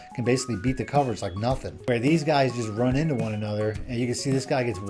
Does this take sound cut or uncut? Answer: cut